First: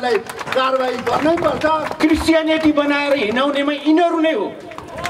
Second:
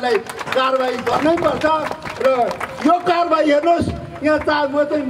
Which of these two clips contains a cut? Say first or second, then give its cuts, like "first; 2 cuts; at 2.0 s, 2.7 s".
first; 1 cut; at 1.9 s